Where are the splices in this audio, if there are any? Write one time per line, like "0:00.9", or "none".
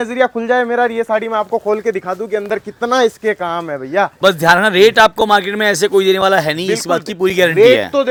none